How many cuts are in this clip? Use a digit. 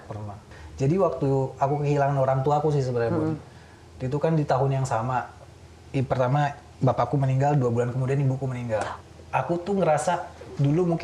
1